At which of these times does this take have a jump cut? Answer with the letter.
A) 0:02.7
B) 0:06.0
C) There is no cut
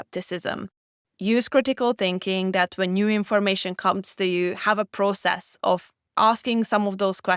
B